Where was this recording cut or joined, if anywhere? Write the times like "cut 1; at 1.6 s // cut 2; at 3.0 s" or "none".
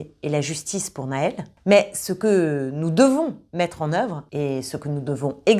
cut 1; at 1.5 s // cut 2; at 4.2 s